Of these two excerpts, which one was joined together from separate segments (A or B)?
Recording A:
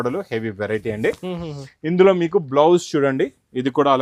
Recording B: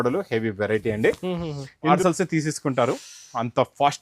B